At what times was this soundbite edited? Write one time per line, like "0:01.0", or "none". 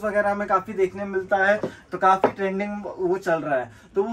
none